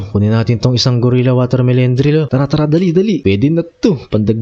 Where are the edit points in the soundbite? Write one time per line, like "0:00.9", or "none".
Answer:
0:02.3
0:03.2